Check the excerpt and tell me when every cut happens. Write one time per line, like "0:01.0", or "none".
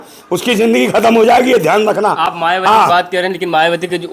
none